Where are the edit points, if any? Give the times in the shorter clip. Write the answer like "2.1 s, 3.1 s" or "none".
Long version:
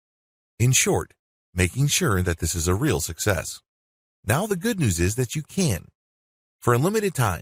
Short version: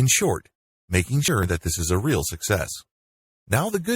1.2 s